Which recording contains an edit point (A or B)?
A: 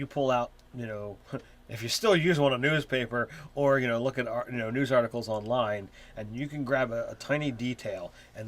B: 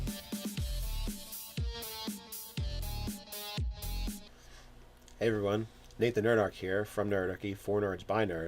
B